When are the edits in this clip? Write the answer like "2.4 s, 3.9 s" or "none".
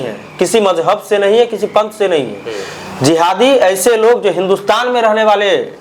none